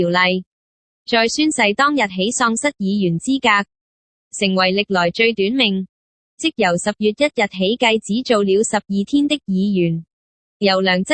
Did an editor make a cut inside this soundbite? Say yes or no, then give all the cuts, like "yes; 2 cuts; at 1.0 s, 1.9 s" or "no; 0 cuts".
no; 0 cuts